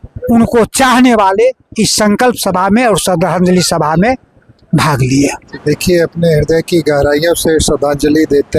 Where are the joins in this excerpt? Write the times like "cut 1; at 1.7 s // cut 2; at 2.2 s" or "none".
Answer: cut 1; at 5.4 s

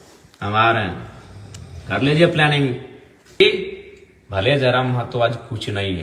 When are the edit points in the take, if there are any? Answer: cut 1; at 3.4 s

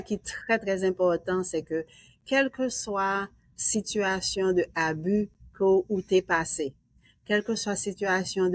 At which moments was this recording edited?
none

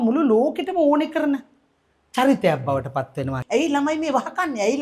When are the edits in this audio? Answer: cut 1; at 3.4 s

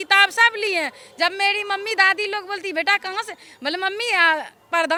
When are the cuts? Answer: none

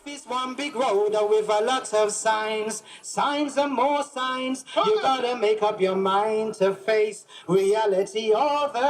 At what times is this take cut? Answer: none

